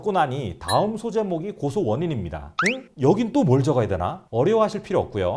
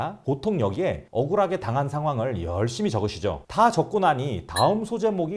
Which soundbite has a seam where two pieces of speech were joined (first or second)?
first